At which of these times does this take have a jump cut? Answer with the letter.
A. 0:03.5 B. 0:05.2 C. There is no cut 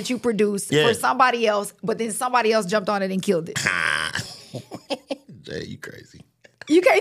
C